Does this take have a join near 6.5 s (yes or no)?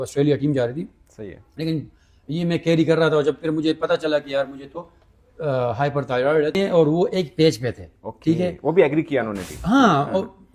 yes